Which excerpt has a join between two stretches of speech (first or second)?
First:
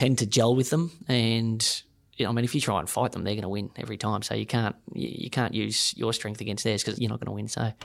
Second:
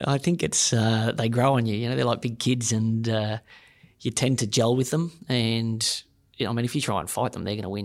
first